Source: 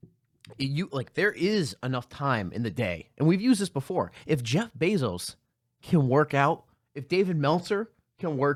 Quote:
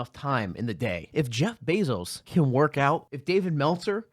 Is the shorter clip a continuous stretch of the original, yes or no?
no